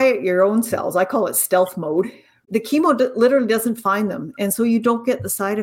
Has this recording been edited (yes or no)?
yes